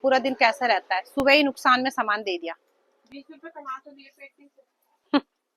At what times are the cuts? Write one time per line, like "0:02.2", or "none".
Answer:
none